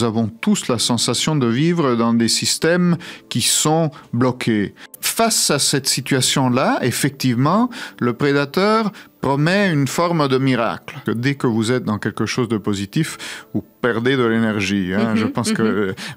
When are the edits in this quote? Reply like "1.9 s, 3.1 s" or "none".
5.0 s, 11.0 s